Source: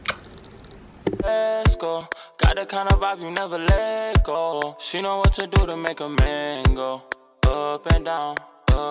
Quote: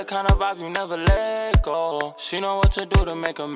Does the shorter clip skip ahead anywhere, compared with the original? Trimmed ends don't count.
no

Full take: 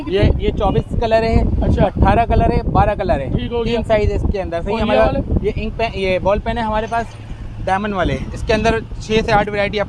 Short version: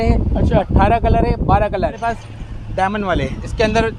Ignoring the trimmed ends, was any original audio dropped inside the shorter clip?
yes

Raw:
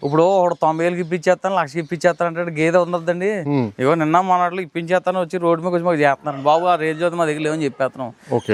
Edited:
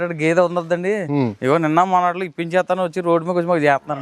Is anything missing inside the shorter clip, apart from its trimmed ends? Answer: no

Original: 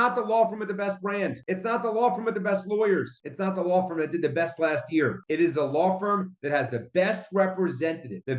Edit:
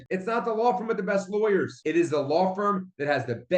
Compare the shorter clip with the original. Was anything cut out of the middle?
yes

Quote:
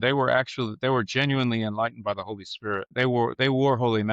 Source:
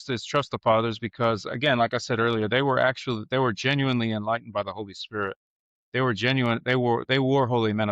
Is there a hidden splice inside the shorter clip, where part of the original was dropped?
yes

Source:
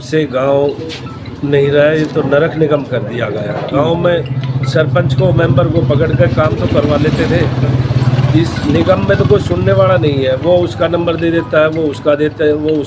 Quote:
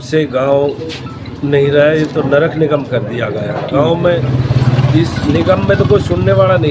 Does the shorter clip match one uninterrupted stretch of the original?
no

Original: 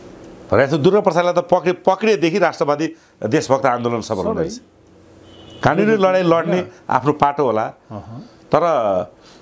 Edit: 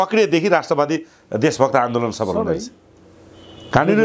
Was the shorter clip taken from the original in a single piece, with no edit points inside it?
yes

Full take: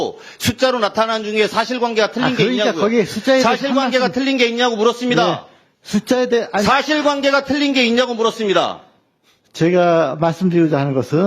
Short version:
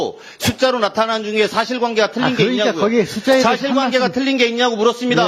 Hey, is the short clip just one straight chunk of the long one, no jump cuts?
yes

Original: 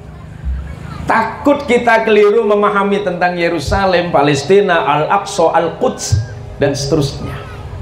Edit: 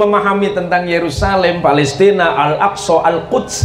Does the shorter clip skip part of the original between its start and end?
no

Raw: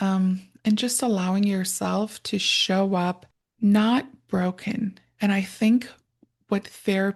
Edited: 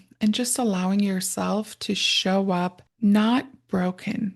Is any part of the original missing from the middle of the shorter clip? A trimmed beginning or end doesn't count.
yes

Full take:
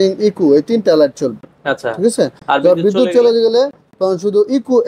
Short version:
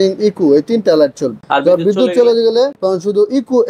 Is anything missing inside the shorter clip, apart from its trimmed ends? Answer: yes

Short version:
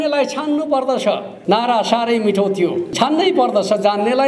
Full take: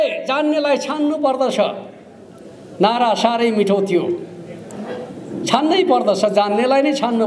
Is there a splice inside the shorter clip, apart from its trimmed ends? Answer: yes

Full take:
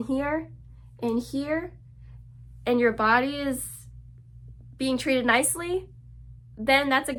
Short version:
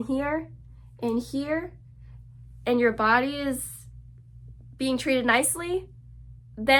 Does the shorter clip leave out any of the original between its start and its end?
no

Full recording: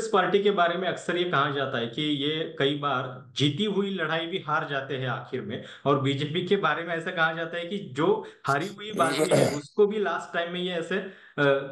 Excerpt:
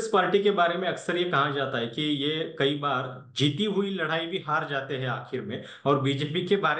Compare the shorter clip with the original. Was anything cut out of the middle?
no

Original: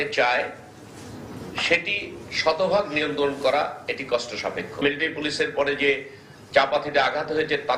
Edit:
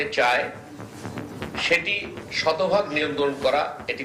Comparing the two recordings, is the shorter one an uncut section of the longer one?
yes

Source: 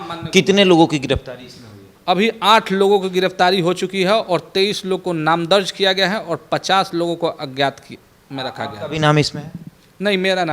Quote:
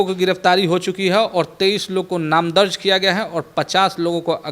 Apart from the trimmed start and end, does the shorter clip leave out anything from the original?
no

